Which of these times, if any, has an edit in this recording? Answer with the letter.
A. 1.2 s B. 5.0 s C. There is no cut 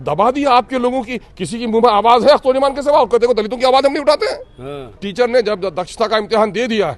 B